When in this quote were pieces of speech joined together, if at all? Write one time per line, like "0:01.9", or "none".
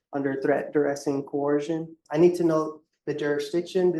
0:02.0